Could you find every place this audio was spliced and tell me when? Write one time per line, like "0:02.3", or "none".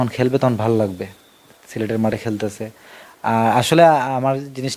none